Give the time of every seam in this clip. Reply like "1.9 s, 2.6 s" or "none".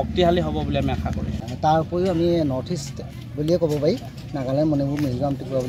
1.4 s